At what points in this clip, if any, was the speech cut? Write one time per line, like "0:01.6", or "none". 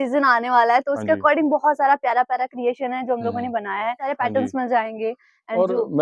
0:04.1